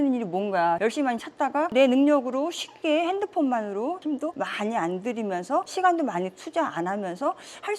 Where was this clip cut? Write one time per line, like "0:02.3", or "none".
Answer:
none